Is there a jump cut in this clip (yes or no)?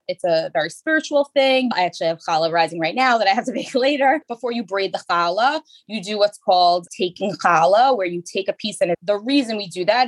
no